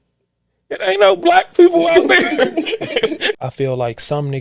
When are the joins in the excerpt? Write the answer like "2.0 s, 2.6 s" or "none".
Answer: 3.4 s